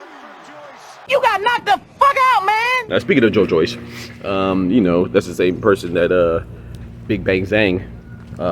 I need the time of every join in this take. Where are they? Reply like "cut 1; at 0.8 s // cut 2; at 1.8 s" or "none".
cut 1; at 1.0 s // cut 2; at 2.8 s